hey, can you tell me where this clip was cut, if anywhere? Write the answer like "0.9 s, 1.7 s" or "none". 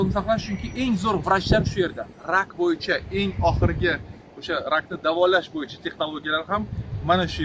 none